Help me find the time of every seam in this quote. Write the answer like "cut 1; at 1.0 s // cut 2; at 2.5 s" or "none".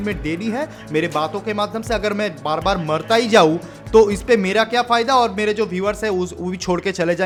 none